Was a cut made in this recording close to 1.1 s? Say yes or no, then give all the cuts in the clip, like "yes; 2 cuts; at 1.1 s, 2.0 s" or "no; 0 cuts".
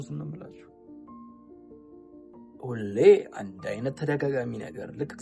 yes; 2 cuts; at 1.1 s, 2.5 s